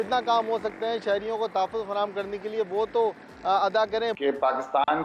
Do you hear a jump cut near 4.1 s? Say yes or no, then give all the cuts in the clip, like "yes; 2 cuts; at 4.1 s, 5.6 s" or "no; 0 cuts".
yes; 1 cut; at 4.1 s